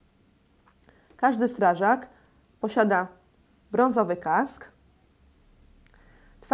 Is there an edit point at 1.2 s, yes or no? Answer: no